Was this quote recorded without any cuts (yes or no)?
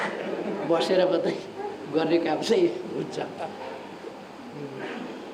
yes